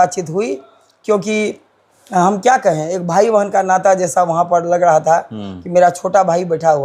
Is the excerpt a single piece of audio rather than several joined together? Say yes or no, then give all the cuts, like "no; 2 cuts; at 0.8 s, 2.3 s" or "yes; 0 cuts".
yes; 0 cuts